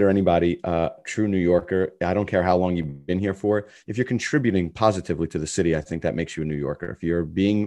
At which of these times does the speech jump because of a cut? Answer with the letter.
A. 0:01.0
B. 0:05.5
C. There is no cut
A